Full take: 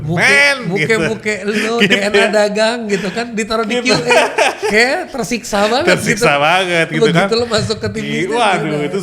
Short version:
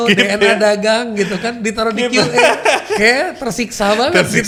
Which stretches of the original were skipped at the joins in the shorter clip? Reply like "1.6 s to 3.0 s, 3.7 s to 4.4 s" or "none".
none